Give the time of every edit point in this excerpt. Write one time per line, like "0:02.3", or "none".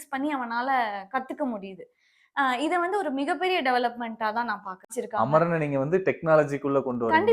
0:04.8

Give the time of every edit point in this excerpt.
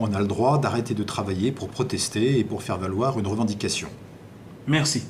none

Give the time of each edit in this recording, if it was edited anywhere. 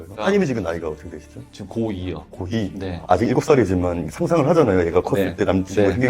0:03.0

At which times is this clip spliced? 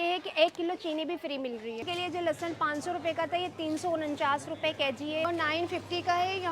0:01.8
0:05.3

